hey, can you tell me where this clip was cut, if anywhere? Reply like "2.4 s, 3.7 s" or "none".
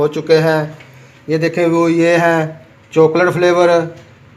none